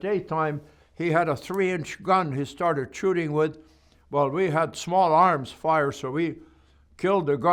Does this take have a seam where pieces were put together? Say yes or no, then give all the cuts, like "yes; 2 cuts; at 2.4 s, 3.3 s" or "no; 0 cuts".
no; 0 cuts